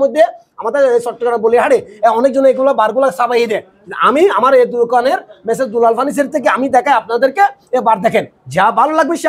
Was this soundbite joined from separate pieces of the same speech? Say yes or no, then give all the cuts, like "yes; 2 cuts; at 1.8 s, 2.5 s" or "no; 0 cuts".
no; 0 cuts